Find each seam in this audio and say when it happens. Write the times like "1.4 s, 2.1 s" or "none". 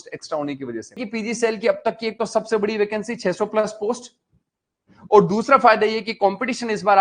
1.0 s

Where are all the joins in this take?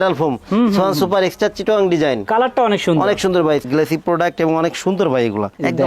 3.7 s

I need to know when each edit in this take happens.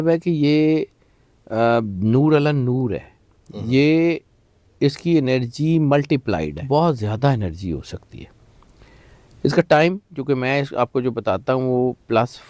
6.6 s

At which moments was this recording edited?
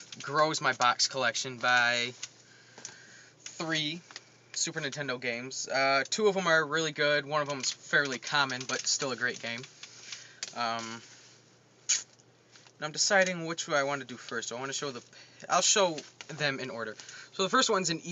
13.1 s

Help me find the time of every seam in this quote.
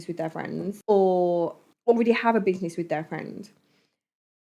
0.8 s, 1.6 s

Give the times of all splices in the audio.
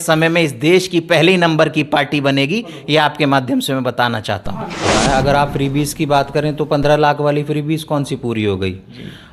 4.9 s

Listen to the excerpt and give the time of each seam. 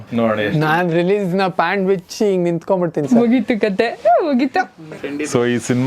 4.8 s

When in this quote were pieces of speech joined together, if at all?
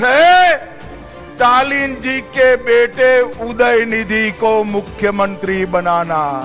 none

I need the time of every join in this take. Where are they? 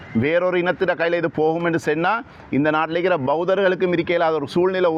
none

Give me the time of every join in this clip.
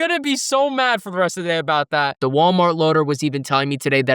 2.2 s

